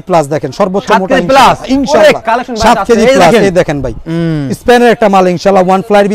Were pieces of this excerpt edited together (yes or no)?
no